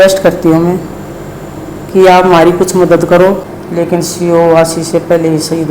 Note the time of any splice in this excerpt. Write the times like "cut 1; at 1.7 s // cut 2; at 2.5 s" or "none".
cut 1; at 3.5 s